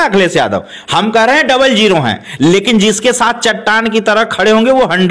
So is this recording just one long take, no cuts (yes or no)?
yes